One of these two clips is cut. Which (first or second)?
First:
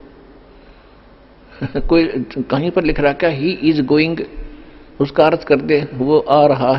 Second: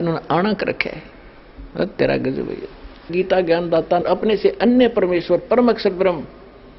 second